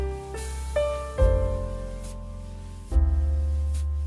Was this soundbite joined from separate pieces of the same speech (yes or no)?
no